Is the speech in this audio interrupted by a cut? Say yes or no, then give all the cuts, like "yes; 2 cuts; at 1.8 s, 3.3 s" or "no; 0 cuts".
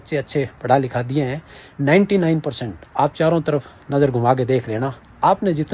no; 0 cuts